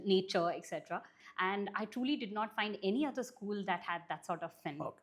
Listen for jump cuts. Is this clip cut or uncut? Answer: cut